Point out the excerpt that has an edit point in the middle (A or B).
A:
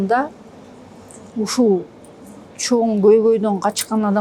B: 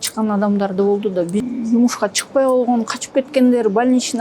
B